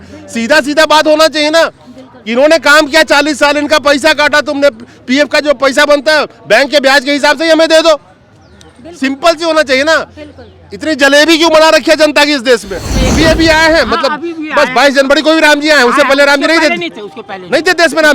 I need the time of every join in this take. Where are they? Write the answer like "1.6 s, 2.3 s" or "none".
13.0 s